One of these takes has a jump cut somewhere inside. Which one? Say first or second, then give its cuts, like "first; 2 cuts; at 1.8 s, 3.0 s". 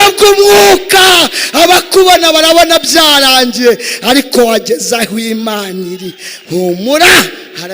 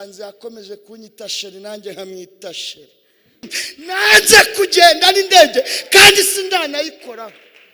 second; 1 cut; at 3.6 s